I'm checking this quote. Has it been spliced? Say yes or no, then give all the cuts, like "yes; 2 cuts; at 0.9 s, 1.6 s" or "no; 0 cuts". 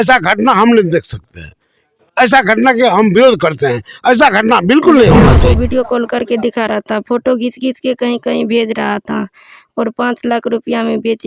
yes; 1 cut; at 5.3 s